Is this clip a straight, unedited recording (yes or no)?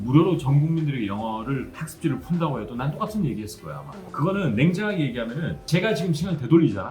no